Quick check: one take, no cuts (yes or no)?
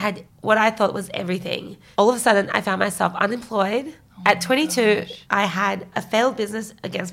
no